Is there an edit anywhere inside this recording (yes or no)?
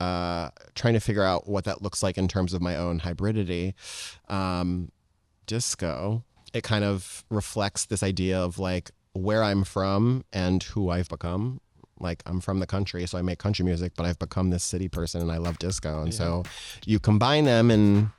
yes